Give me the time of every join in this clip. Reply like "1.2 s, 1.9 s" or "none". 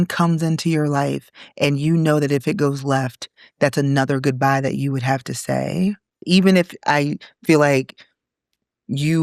6.2 s